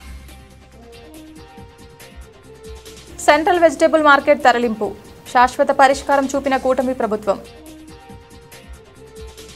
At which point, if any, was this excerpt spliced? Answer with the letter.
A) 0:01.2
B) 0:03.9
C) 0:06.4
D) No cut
A